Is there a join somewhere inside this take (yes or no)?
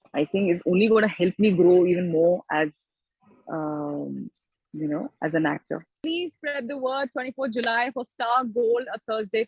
yes